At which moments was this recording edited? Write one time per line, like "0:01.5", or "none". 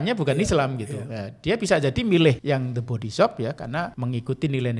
0:02.4
0:03.9